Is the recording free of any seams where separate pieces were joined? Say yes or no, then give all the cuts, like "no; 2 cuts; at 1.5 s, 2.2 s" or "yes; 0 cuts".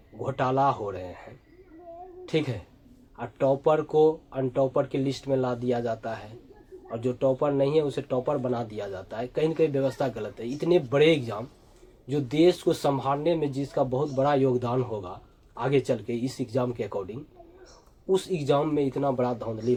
yes; 0 cuts